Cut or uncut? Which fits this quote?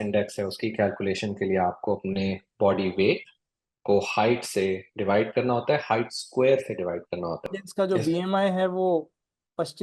cut